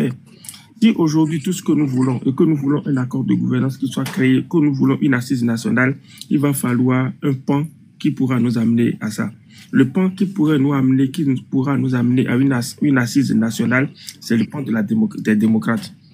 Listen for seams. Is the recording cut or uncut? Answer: uncut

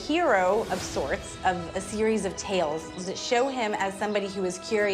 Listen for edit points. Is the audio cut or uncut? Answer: cut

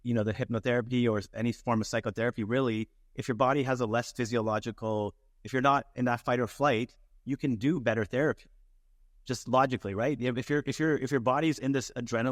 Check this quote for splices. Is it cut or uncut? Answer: uncut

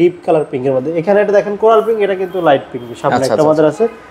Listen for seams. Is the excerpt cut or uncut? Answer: uncut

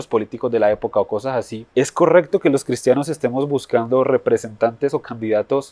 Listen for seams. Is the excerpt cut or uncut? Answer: cut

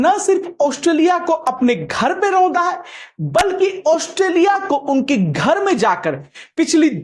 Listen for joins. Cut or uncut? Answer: uncut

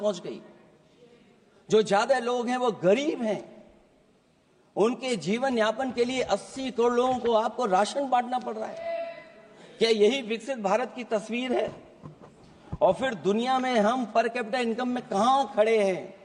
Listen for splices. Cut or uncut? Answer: uncut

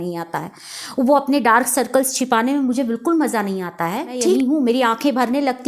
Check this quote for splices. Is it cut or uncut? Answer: cut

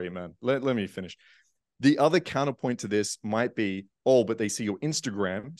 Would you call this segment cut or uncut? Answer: uncut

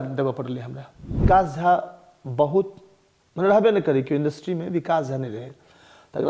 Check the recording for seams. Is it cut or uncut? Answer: cut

